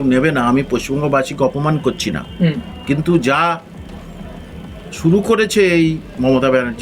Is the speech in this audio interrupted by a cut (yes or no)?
no